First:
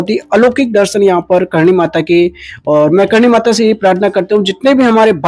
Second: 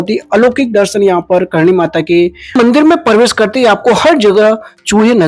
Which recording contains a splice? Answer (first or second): second